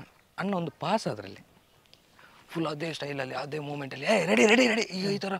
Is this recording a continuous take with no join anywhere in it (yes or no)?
yes